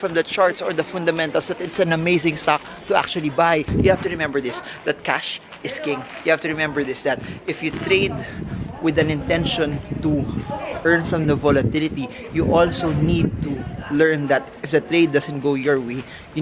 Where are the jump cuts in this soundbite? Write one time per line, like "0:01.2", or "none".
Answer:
0:03.7